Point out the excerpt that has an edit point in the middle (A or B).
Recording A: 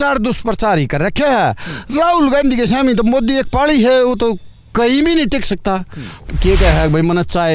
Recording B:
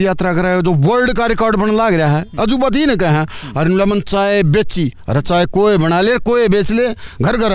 A